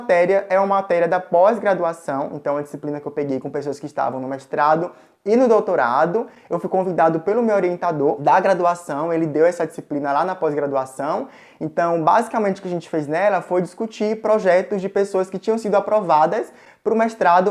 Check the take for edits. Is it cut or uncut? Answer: uncut